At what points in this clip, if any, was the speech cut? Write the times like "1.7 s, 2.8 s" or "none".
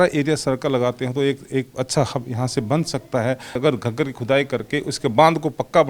3.5 s

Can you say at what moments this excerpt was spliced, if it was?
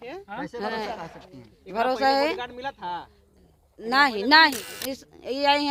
4.7 s

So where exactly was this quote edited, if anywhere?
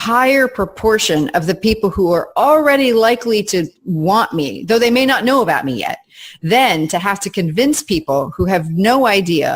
none

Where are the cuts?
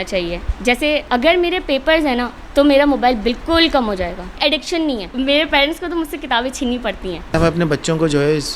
1.1 s, 5.1 s, 7.4 s

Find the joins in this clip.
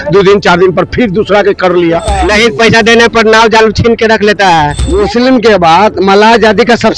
2.1 s, 4.8 s

